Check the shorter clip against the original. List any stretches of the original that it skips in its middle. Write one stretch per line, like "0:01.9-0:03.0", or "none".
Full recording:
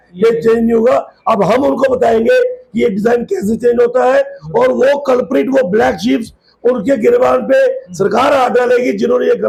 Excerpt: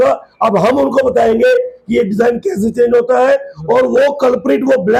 none